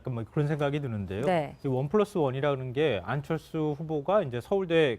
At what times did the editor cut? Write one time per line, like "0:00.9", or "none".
0:03.9